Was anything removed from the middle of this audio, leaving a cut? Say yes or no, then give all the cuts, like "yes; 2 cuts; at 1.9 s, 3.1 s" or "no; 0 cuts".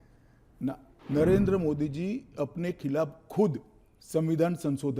yes; 1 cut; at 0.9 s